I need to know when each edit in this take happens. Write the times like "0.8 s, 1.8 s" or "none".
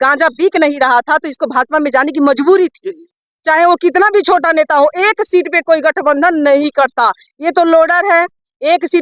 3.1 s

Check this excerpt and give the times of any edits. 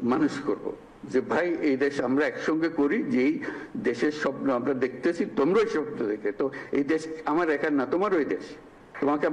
none

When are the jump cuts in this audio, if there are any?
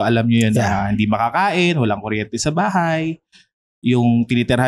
none

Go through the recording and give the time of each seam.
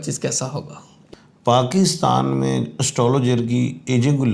0.9 s

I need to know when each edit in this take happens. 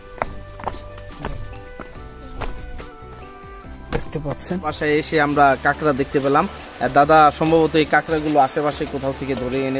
4.6 s

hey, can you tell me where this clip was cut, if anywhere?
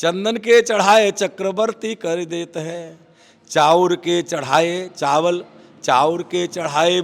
none

